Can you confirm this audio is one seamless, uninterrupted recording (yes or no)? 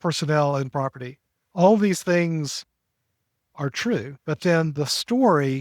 no